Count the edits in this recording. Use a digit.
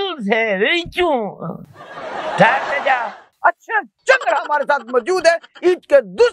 1